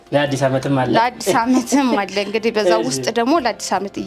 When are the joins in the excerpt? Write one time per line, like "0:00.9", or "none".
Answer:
none

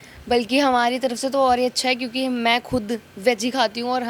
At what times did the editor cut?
none

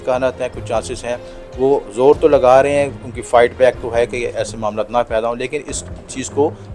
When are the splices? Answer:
none

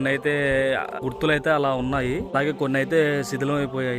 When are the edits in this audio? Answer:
0:01.0
0:02.3

